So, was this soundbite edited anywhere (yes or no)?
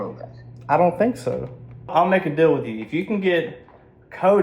yes